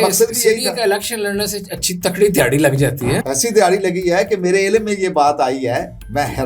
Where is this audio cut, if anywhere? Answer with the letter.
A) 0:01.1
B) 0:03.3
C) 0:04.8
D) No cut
B